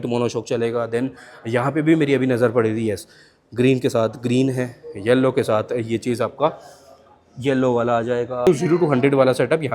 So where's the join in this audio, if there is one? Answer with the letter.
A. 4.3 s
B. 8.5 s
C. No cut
B